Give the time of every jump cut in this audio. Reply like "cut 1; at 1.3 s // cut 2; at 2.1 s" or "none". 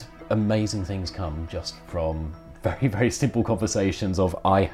none